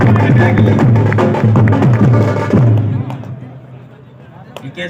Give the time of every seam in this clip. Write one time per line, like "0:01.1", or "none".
0:02.0